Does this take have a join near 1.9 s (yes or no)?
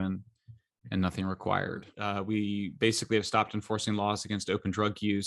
yes